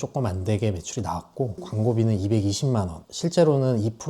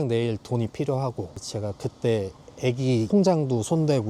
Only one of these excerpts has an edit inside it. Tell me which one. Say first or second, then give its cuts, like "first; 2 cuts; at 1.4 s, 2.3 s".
first; 1 cut; at 1.6 s